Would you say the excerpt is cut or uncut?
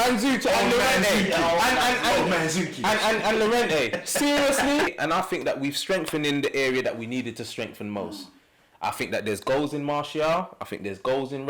cut